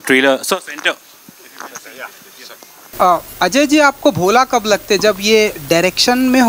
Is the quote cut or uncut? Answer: cut